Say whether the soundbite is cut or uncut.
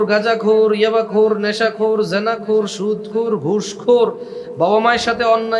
uncut